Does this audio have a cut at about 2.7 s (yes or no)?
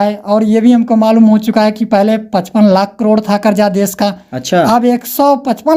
no